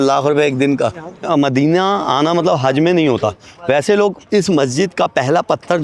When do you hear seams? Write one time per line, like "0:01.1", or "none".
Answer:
0:01.3
0:04.2